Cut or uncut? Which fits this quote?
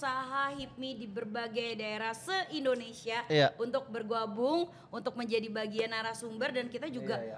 uncut